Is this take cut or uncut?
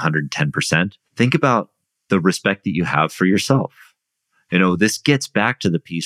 cut